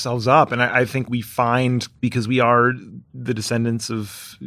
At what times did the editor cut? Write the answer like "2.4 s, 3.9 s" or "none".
1.1 s